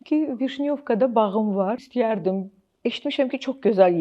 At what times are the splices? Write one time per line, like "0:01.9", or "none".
0:01.9